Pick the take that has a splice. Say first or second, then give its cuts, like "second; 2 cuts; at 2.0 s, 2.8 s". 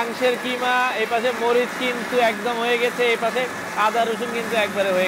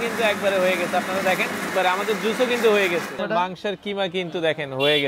second; 2 cuts; at 1.7 s, 3.1 s